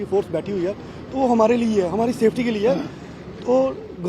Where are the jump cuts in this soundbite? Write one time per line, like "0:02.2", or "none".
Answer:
none